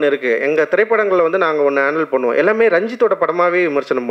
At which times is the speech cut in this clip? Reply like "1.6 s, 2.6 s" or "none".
none